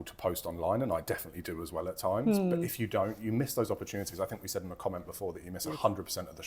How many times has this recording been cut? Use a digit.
0